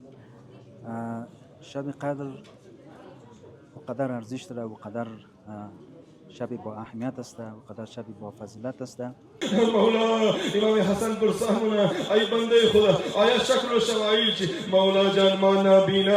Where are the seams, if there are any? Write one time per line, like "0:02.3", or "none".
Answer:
0:09.4